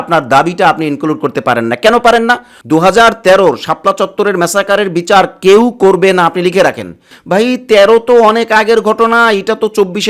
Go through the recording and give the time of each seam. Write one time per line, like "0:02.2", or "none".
0:02.5
0:07.1